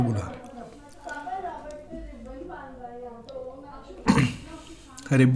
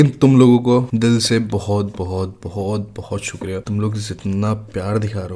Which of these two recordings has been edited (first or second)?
second